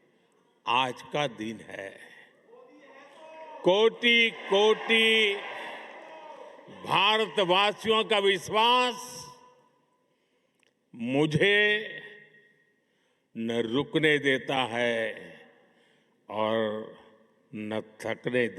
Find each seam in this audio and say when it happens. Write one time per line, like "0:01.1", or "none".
none